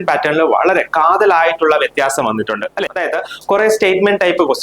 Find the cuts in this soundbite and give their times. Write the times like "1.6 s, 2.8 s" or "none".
2.8 s